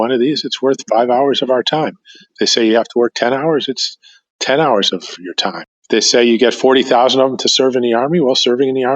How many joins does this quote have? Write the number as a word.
one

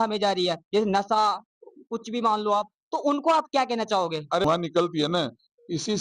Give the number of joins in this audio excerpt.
one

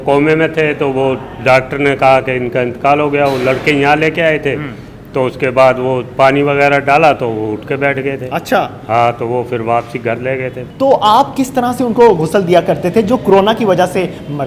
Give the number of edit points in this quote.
one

